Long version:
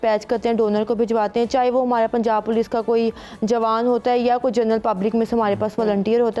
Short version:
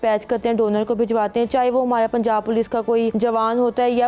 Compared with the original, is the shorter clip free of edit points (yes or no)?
no